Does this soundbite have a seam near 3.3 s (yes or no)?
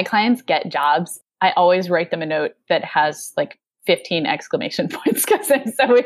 no